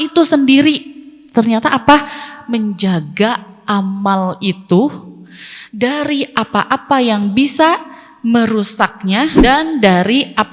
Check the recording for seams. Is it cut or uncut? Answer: cut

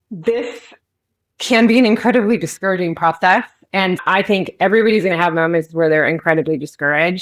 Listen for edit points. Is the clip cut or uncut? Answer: cut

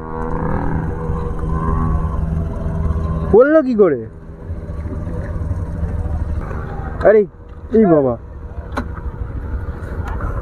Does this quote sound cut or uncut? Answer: cut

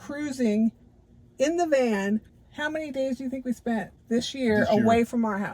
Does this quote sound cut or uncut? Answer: cut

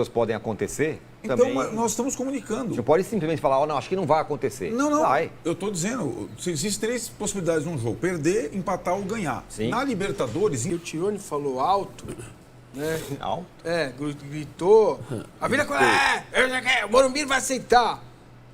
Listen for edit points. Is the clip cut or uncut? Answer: cut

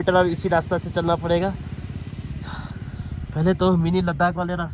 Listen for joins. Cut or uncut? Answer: uncut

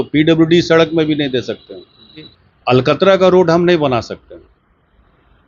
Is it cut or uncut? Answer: cut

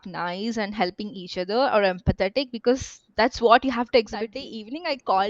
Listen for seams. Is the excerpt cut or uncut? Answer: cut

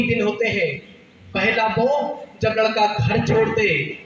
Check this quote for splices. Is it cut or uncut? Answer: uncut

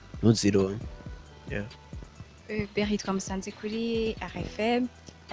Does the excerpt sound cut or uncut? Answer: uncut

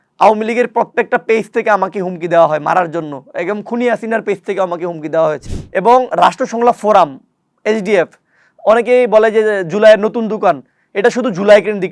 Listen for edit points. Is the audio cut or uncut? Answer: cut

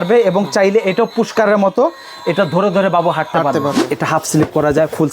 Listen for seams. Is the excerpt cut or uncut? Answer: cut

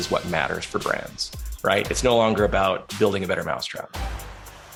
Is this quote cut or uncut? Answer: uncut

